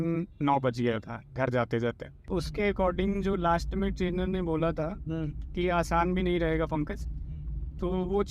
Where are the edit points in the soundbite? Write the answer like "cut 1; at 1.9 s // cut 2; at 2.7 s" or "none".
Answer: cut 1; at 2.2 s

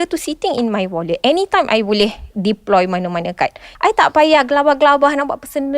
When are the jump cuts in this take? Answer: cut 1; at 3.6 s

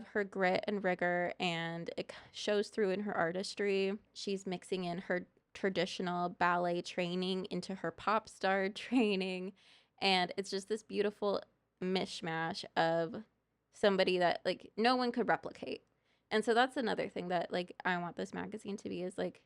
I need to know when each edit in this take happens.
cut 1; at 4.1 s

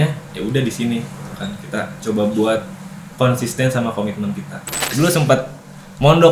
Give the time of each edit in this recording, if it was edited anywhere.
cut 1; at 4.8 s

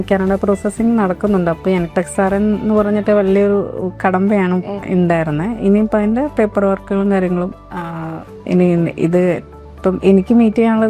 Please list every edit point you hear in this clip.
none

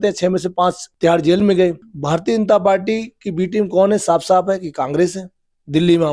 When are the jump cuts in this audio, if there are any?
cut 1; at 0.9 s // cut 2; at 1.9 s

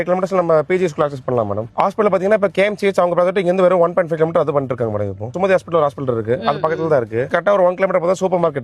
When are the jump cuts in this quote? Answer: cut 1; at 1.7 s // cut 2; at 7.3 s

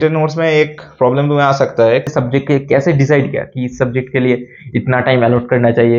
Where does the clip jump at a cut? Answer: cut 1; at 2.1 s

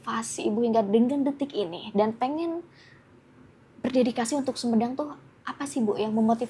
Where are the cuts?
none

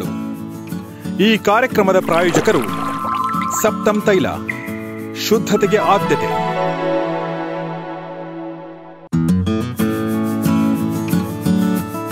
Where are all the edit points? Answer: none

